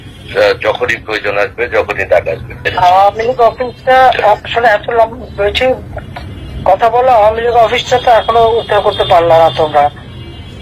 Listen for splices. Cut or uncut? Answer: cut